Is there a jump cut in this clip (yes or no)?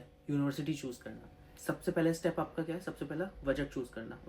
yes